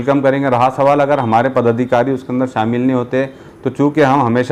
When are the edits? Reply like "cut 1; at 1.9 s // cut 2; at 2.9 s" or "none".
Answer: none

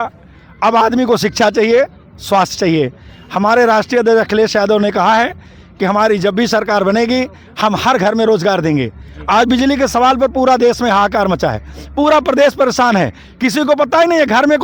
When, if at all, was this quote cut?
none

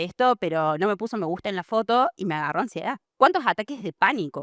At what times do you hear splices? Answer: none

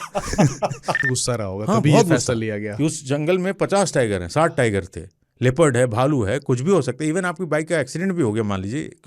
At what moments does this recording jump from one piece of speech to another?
cut 1; at 1.1 s

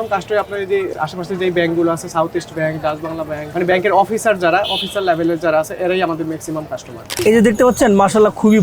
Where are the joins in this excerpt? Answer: cut 1; at 0.9 s // cut 2; at 3.4 s // cut 3; at 7.1 s

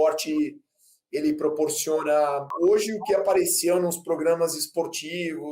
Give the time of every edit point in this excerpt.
cut 1; at 2.5 s

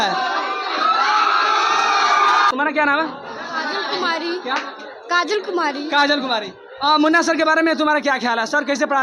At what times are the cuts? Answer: cut 1; at 2.5 s

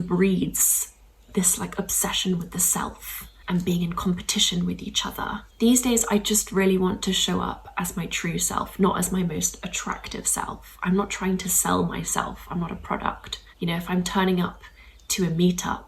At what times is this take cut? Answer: cut 1; at 3.4 s // cut 2; at 5.4 s

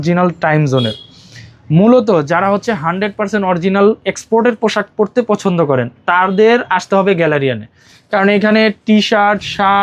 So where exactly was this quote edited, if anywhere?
none

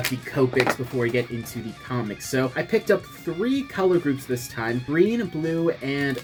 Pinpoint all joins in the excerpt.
none

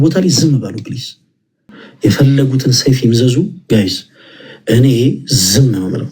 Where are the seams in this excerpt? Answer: cut 1; at 1.8 s

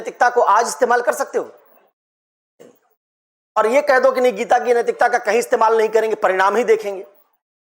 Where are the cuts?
none

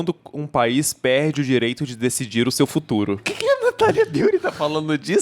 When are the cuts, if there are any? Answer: cut 1; at 3.3 s

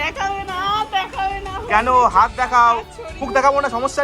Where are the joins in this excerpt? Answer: cut 1; at 3.1 s

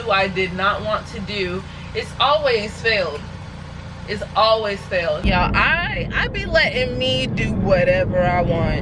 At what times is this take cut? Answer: cut 1; at 5.2 s

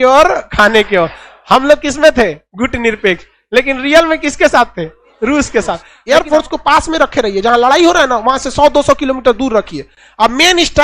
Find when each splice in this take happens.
cut 1; at 5.9 s

